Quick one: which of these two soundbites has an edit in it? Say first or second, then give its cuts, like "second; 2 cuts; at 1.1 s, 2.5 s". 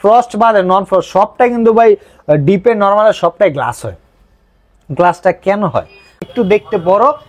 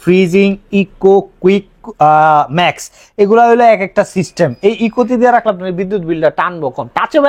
first; 1 cut; at 6.3 s